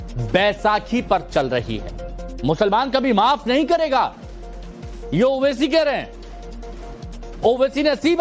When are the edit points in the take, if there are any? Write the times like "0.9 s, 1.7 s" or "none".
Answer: none